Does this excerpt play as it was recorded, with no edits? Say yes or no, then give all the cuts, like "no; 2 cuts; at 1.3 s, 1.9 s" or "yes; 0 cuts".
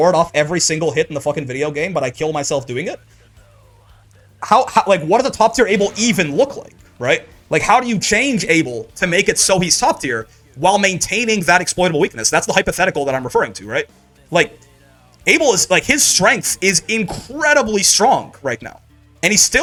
yes; 0 cuts